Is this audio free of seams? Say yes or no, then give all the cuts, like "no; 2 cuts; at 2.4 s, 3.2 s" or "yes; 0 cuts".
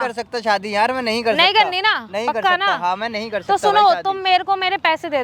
yes; 0 cuts